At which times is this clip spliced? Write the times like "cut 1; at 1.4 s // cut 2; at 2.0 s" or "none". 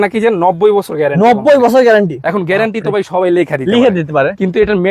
none